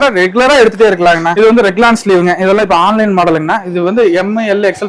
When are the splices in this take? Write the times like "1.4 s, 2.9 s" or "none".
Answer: 1.2 s